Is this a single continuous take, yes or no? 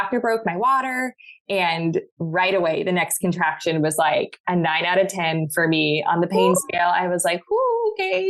yes